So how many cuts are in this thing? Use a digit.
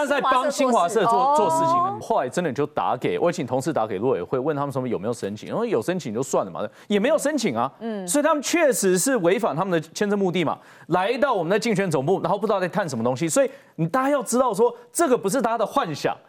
1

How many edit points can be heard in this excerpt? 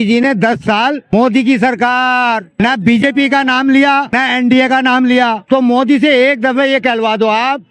4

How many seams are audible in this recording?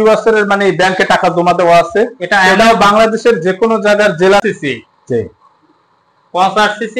1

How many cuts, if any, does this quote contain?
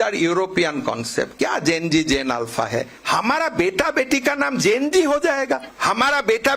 2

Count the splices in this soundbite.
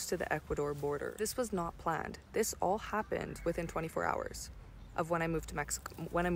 1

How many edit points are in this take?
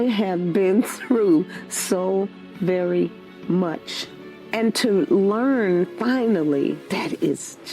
1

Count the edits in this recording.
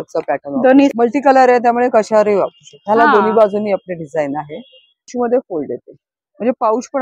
2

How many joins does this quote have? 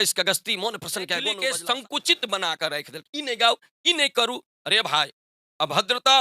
1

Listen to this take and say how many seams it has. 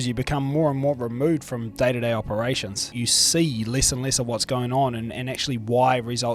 1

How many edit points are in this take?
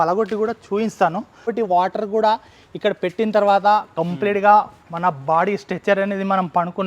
1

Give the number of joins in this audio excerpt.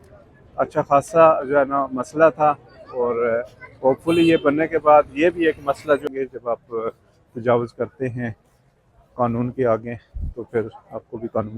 1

